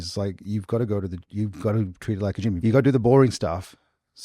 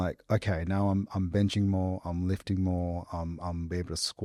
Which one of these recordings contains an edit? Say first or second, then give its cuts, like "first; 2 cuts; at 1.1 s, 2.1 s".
first; 1 cut; at 2.6 s